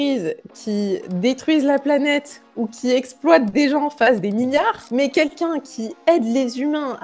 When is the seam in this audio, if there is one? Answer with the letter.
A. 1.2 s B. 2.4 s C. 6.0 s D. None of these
D